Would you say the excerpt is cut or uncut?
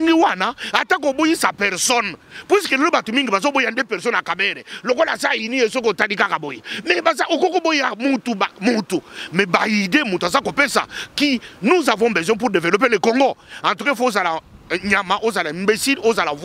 uncut